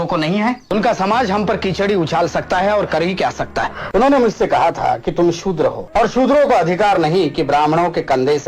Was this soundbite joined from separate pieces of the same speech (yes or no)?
yes